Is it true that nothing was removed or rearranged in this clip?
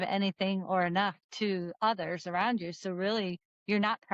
yes; 0 cuts

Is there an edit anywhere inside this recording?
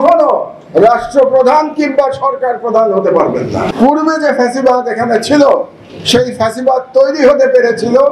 yes; 1 cut; at 3.7 s

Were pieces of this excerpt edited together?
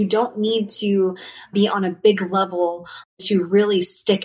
yes; 2 cuts; at 1.5 s, 3.1 s

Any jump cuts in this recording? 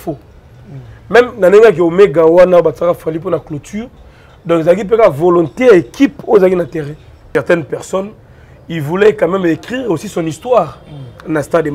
yes; 1 cut; at 7.3 s

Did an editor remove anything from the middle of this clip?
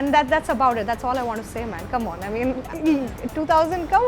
yes; 1 cut; at 2.7 s

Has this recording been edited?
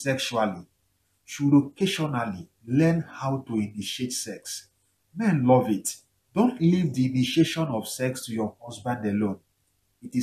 no; 0 cuts

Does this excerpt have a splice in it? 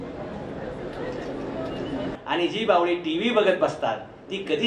yes; 1 cut; at 2.1 s

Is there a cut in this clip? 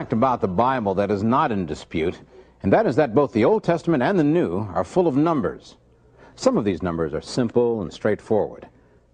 yes; 1 cut; at 4.8 s

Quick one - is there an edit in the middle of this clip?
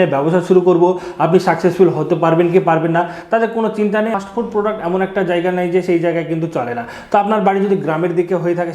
yes; 1 cut; at 4.1 s

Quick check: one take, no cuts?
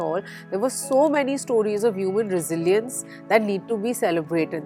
yes; 0 cuts

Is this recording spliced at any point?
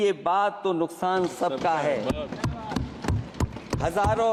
no; 0 cuts

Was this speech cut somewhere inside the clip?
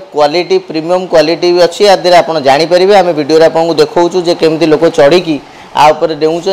no; 0 cuts

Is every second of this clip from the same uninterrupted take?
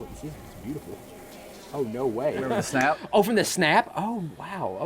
no; 1 cut; at 2.5 s

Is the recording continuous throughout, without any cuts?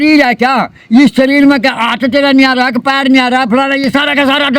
yes; 0 cuts

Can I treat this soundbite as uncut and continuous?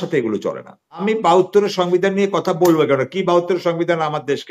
no; 1 cut; at 1.0 s

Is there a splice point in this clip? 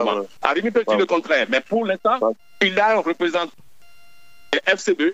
no; 0 cuts

